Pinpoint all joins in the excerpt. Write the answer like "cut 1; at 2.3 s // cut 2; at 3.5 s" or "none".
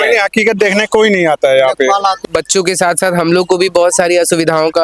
cut 1; at 2.2 s